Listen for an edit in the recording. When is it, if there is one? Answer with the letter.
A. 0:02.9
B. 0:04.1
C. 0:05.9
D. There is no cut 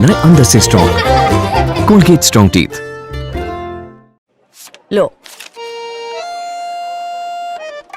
B